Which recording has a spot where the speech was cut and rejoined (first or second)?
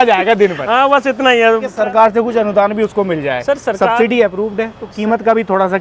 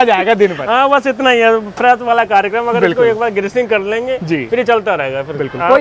first